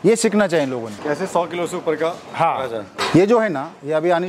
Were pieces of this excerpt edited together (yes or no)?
yes